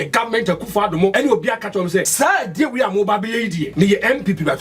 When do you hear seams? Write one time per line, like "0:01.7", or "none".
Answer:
0:01.1
0:02.1
0:03.6